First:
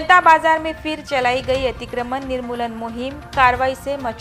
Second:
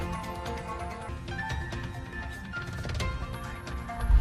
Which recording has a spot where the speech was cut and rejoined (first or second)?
second